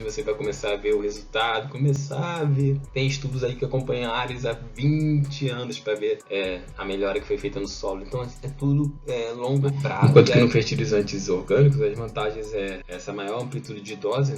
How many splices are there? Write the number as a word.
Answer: one